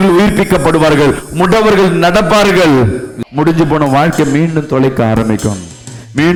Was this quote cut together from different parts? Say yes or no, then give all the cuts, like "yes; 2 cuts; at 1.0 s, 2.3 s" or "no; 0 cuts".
no; 0 cuts